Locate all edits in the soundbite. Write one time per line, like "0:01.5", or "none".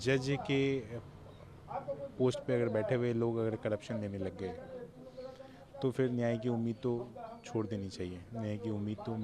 none